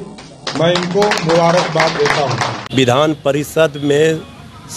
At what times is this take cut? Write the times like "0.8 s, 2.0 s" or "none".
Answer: 2.6 s